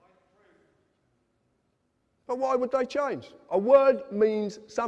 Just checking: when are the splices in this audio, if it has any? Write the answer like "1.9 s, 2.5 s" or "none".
3.5 s